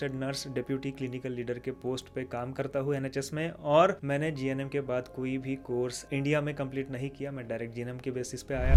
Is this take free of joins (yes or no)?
yes